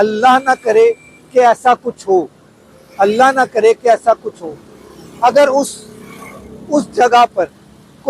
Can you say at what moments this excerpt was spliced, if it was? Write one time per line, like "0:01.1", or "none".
none